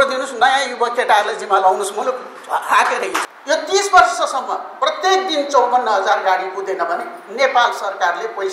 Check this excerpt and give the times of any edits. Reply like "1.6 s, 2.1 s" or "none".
3.3 s